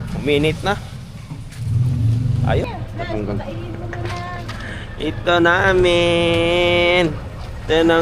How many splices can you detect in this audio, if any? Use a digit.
1